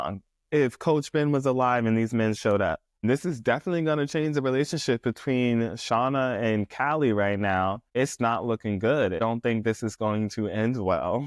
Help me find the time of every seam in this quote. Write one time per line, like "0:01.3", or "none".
0:03.0
0:07.9
0:09.2